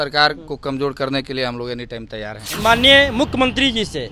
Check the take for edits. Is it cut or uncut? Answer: cut